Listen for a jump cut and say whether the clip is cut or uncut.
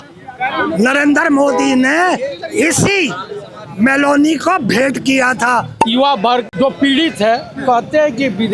cut